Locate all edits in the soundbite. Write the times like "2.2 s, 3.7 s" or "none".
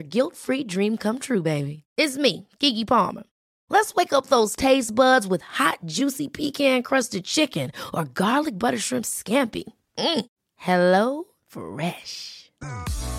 none